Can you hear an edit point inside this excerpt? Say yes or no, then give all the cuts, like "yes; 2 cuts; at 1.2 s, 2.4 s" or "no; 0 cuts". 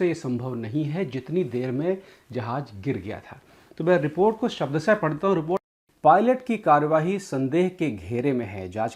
yes; 1 cut; at 5.7 s